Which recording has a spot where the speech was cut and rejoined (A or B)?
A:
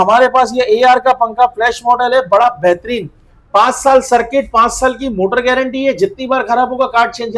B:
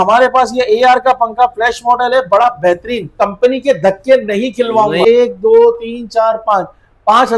B